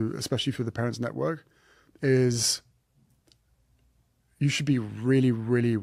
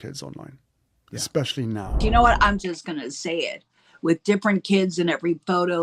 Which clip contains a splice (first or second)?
second